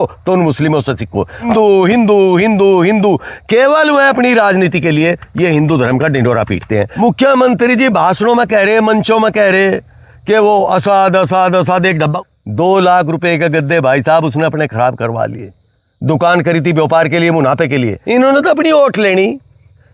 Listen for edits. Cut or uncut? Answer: cut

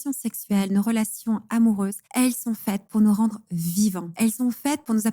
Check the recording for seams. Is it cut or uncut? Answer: cut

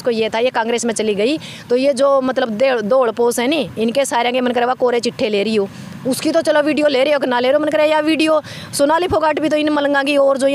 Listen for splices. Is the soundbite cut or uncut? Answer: uncut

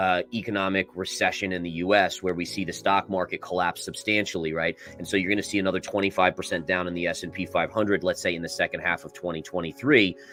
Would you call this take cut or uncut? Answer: uncut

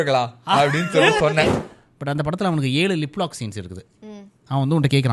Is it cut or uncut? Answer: cut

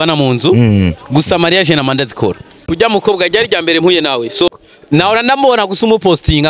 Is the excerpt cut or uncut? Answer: cut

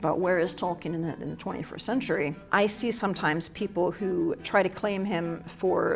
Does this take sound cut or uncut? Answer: cut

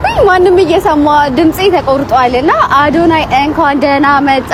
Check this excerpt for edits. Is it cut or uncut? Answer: uncut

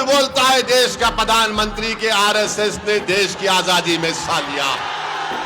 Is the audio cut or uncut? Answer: uncut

